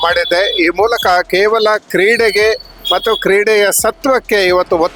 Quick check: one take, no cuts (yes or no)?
yes